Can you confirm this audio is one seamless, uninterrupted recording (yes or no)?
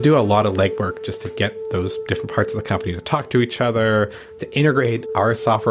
yes